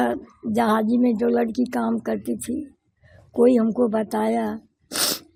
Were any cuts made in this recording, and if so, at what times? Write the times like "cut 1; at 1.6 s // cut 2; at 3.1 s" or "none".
none